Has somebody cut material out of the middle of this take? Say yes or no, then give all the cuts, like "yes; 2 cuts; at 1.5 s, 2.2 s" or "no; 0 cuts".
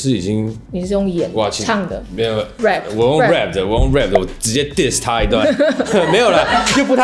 no; 0 cuts